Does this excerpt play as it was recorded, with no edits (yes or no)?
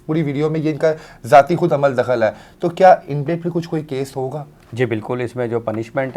yes